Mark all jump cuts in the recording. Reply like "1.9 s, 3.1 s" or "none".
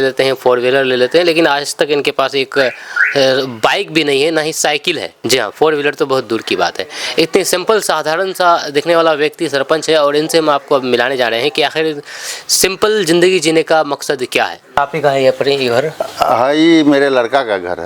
5.1 s, 14.8 s